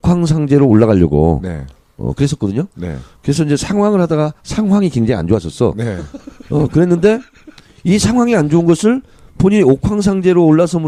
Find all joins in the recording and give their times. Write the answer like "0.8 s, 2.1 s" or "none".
none